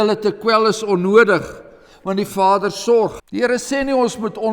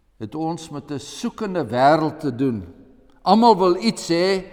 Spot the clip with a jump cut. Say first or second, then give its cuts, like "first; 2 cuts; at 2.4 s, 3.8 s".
first; 1 cut; at 3.2 s